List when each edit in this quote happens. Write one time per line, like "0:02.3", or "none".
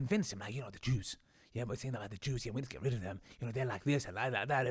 none